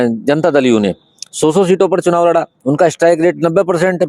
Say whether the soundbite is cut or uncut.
uncut